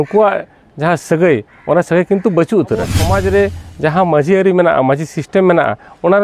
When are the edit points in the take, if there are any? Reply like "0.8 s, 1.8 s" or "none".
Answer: 3.0 s